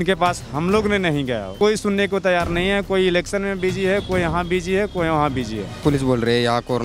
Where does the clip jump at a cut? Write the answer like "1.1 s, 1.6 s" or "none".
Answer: 1.5 s, 5.8 s